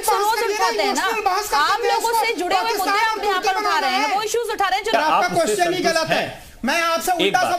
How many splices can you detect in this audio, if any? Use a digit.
1